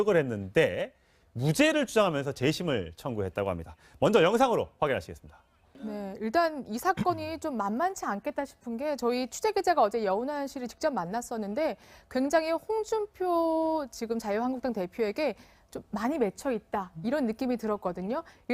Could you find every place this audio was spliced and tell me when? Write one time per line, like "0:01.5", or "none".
none